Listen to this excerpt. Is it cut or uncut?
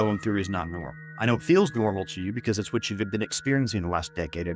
uncut